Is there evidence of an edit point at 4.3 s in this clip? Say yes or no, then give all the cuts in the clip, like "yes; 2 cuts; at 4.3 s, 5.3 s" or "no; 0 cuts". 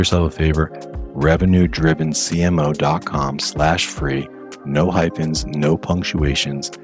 no; 0 cuts